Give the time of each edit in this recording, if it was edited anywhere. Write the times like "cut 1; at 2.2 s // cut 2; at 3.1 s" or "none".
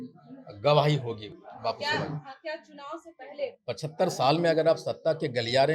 none